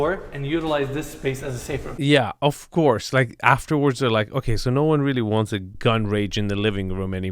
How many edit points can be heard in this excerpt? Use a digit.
1